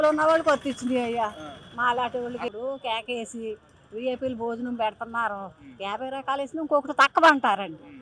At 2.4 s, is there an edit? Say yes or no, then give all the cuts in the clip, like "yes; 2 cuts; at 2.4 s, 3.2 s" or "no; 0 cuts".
yes; 1 cut; at 2.4 s